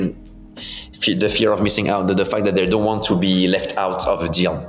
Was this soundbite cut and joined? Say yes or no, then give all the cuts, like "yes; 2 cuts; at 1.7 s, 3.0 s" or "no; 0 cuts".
no; 0 cuts